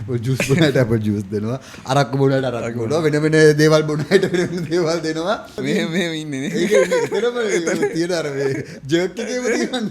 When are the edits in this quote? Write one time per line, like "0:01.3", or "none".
0:05.6